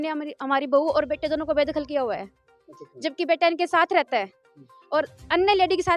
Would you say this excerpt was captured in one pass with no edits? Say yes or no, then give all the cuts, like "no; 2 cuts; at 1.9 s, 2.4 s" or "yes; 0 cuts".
yes; 0 cuts